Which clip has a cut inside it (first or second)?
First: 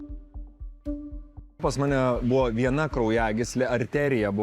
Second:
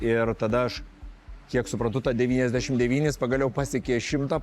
first